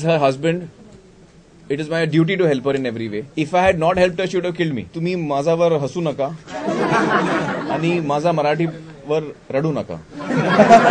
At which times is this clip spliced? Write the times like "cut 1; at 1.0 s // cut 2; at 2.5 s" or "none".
cut 1; at 3.2 s // cut 2; at 4.9 s

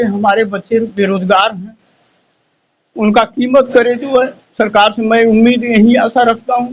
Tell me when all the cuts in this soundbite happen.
none

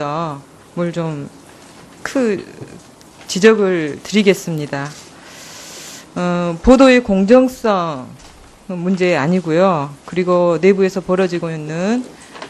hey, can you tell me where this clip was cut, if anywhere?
cut 1; at 6.2 s

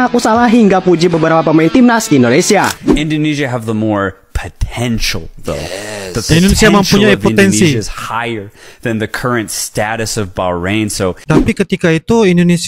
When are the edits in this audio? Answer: cut 1; at 2.8 s // cut 2; at 11.2 s

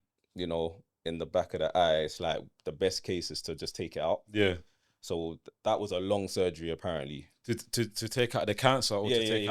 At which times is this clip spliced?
none

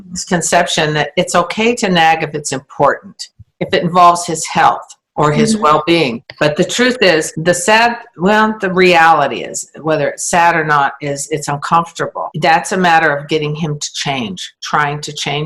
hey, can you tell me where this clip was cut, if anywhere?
none

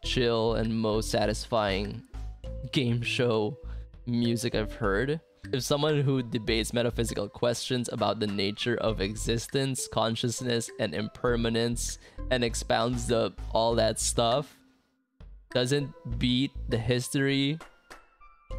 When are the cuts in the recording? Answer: cut 1; at 5.4 s

